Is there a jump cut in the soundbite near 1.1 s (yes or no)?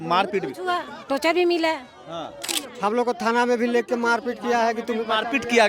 no